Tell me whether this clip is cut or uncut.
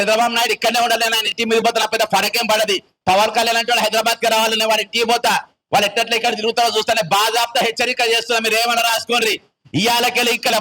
uncut